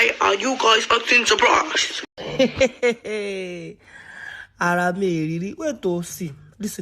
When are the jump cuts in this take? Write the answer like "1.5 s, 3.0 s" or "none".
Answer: 1.9 s